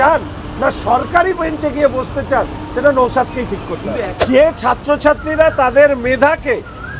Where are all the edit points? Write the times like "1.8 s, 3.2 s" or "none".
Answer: 4.1 s